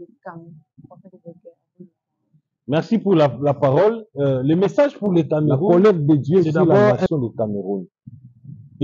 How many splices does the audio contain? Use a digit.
1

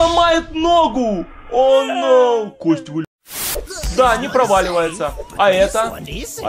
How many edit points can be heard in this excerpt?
1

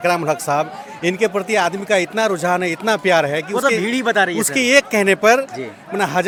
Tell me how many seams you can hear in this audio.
0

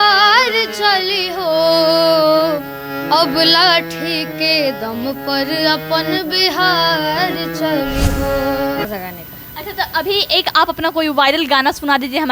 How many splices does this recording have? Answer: 1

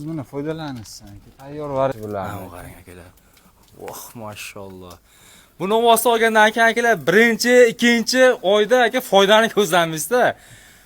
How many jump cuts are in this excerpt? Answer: 1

